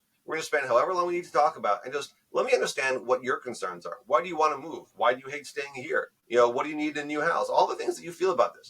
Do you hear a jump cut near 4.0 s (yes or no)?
no